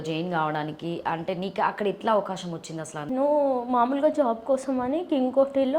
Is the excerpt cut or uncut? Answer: cut